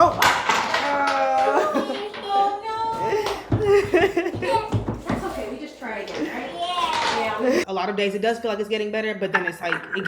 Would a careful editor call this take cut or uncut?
cut